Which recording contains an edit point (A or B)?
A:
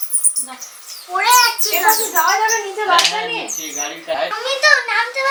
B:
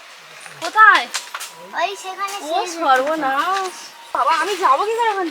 B